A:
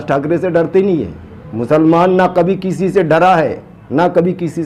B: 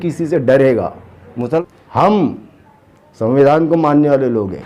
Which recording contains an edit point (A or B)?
B